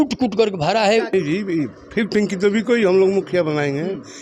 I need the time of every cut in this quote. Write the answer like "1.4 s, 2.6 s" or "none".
1.1 s